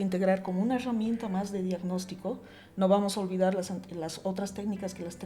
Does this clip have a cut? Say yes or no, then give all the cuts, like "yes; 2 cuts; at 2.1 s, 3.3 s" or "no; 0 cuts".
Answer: no; 0 cuts